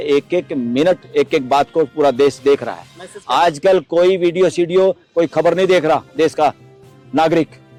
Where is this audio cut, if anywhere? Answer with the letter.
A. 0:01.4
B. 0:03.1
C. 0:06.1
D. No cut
D